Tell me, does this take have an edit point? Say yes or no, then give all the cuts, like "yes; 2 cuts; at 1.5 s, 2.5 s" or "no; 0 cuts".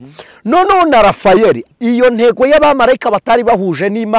yes; 1 cut; at 1.6 s